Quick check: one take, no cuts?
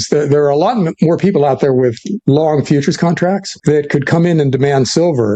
no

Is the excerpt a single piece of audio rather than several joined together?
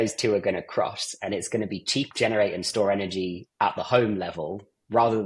no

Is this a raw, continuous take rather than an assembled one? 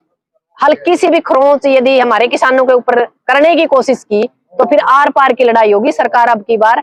yes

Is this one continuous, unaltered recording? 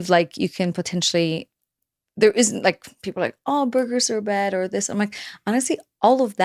yes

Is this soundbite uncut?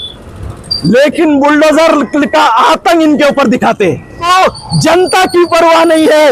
no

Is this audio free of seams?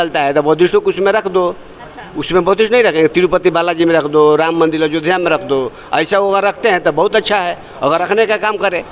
yes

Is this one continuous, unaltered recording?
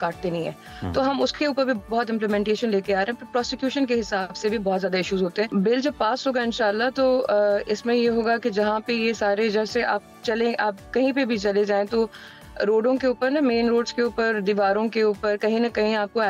no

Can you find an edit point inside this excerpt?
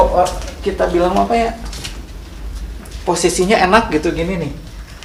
no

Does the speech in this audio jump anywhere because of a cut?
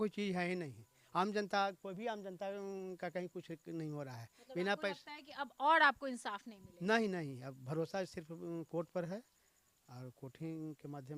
no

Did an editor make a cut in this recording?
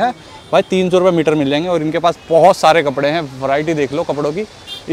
no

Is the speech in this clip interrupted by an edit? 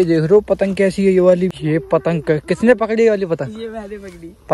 yes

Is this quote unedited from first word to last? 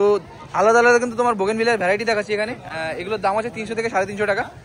yes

